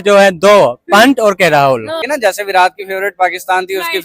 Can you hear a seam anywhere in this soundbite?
yes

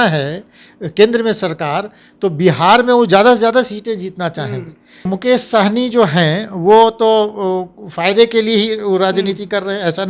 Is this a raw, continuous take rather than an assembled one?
no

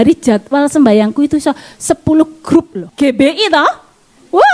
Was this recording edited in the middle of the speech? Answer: yes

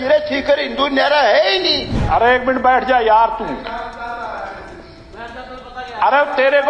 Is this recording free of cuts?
no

